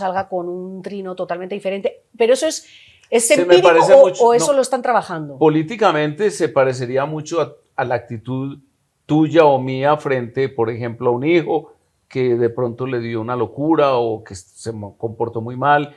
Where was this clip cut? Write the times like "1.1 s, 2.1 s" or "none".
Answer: none